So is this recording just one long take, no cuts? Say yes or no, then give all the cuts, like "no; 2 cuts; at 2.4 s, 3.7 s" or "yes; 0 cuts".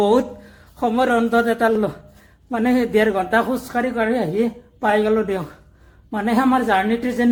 yes; 0 cuts